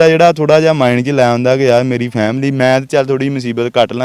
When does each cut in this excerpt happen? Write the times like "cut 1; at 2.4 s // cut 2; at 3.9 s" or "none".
none